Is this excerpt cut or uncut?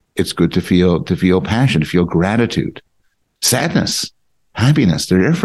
uncut